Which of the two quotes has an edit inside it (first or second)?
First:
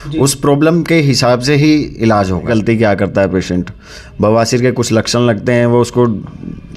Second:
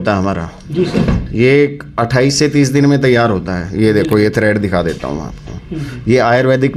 first